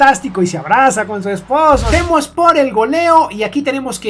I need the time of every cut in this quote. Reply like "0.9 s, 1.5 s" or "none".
1.9 s